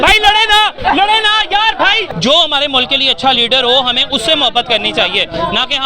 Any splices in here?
yes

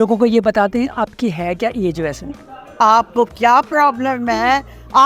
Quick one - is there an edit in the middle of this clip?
no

